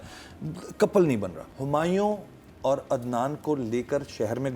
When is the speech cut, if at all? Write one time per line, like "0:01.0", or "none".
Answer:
0:01.4